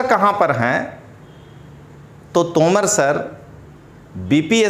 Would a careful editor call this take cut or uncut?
uncut